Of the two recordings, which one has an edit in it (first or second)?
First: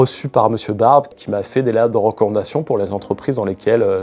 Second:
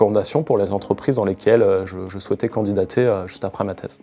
first